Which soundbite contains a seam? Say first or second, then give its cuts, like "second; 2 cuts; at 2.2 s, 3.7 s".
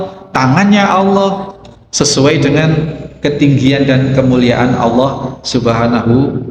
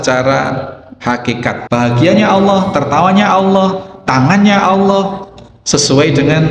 second; 1 cut; at 1.6 s